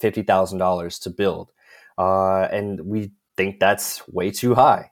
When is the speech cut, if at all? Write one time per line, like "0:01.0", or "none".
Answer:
0:03.2

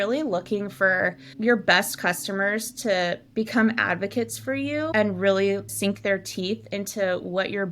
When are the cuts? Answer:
0:01.2
0:04.9

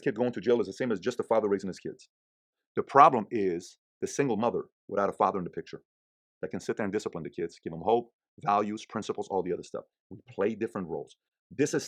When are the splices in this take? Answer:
none

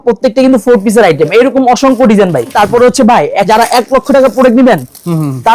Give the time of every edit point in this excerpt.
0:02.5
0:03.5

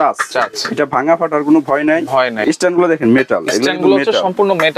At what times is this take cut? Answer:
0:02.4

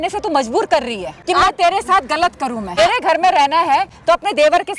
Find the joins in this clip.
0:01.2
0:02.8
0:03.9

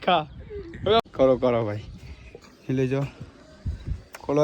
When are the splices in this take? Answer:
0:01.1

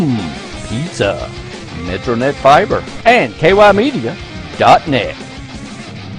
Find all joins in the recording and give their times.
0:02.9

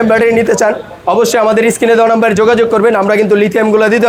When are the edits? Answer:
none

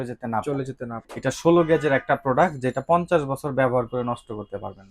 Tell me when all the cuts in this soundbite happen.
0:01.1

